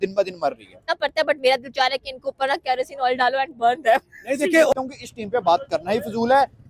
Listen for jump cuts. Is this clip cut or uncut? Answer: cut